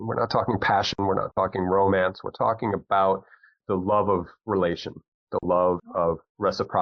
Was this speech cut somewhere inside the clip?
yes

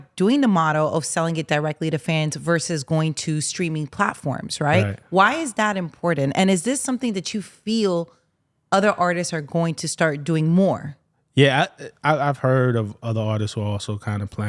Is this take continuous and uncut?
yes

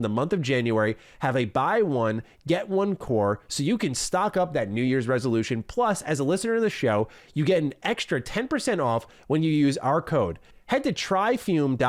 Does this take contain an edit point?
no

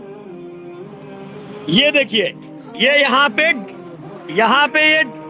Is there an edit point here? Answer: yes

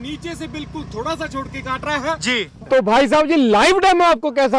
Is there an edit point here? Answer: no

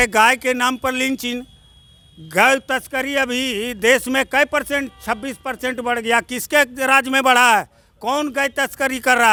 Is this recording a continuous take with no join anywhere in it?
yes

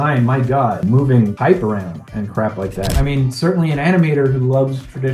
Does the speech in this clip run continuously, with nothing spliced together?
no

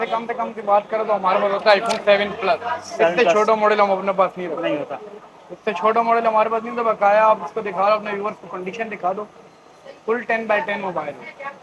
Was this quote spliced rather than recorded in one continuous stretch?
no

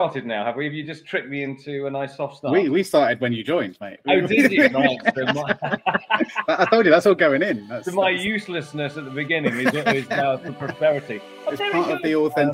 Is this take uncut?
yes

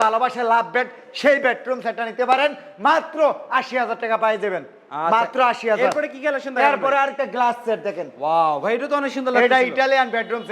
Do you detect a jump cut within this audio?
no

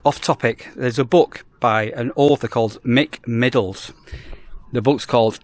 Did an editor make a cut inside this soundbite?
no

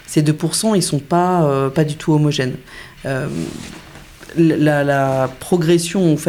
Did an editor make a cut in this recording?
no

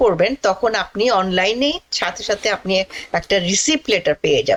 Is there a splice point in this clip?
no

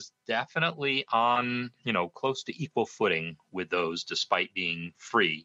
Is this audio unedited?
yes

